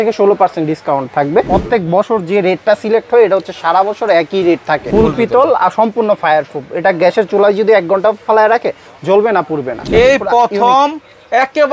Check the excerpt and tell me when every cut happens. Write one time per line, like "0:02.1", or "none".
0:01.5
0:04.8
0:09.8